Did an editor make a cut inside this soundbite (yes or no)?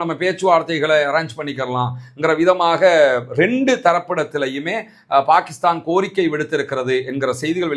no